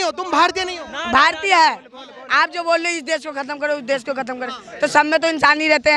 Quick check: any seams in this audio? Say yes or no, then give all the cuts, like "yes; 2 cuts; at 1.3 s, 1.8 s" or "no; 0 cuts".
no; 0 cuts